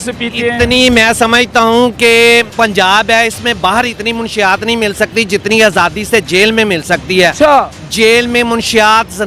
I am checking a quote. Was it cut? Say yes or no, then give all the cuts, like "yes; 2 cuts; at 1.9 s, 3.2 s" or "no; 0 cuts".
yes; 2 cuts; at 2.5 s, 7.8 s